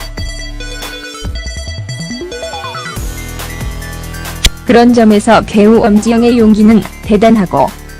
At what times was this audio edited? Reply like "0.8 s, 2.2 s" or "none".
3.2 s